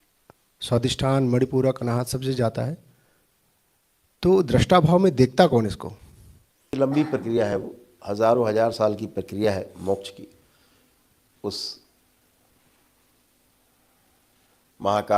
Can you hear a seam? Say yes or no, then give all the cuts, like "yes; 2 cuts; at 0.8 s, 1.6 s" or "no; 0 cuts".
yes; 1 cut; at 6.7 s